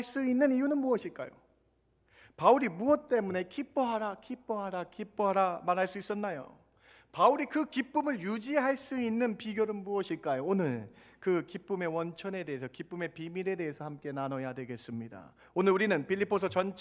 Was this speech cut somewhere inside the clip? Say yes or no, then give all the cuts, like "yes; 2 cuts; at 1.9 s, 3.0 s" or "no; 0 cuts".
no; 0 cuts